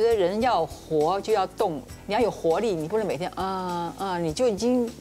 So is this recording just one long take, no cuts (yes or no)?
yes